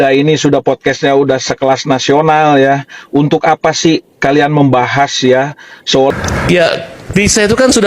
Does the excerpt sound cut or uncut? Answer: cut